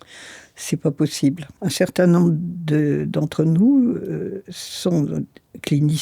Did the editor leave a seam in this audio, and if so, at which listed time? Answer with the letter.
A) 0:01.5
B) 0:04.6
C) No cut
A